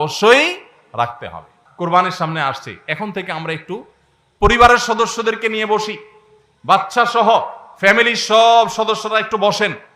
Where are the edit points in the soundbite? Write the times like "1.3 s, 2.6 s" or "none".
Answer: 1.6 s